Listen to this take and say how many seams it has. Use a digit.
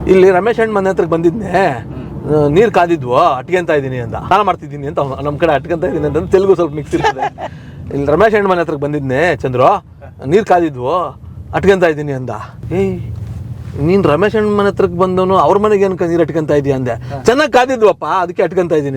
2